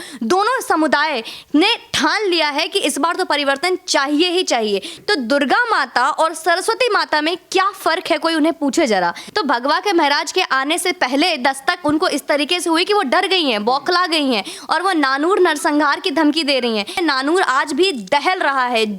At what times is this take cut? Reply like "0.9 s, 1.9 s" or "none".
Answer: 4.9 s, 9.2 s, 17.0 s